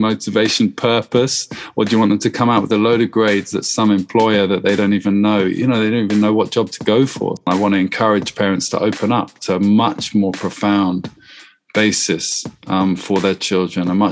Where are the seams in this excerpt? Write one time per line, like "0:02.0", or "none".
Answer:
0:07.5